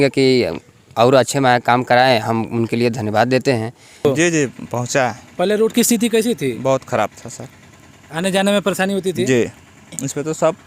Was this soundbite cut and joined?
yes; 1 cut; at 4.0 s

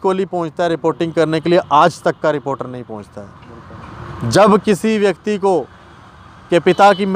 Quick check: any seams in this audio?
no; 0 cuts

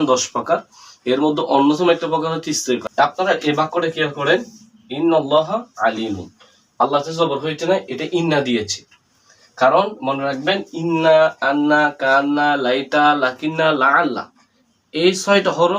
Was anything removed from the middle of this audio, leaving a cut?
yes; 1 cut; at 2.8 s

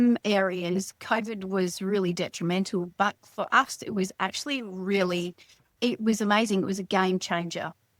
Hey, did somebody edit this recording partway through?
no; 0 cuts

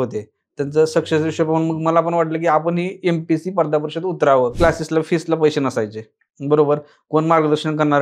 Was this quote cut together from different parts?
yes; 1 cut; at 4.5 s

